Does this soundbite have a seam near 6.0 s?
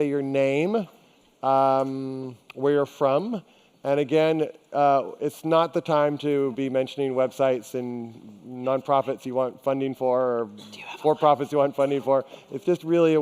no; 1 cut; at 2.8 s

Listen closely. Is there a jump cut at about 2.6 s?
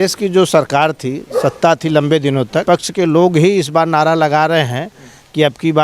yes; 1 cut; at 2.6 s

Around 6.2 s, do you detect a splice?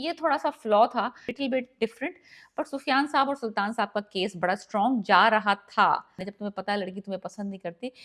yes; 2 cuts; at 1.4 s, 6.2 s

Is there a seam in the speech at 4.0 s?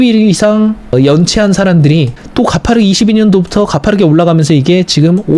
no; 2 cuts; at 0.9 s, 2.2 s

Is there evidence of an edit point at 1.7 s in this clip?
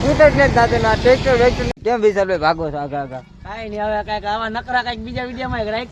yes; 1 cut; at 1.7 s

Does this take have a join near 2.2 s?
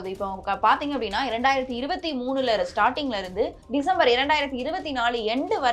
no; 1 cut; at 3.6 s

